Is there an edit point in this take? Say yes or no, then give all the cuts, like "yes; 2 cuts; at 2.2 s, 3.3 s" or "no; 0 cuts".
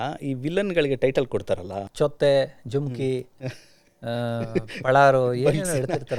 no; 0 cuts